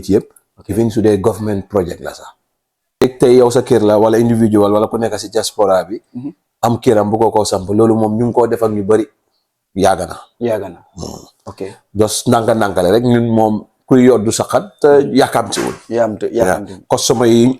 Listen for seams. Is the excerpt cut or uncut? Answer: cut